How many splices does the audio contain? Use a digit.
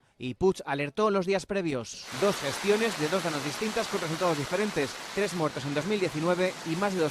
1